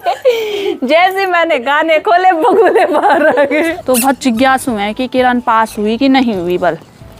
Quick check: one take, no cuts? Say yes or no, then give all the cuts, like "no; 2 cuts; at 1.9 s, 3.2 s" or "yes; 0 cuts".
no; 1 cut; at 3.8 s